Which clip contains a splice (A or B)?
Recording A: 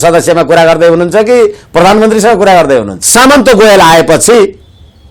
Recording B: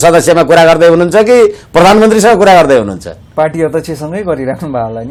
A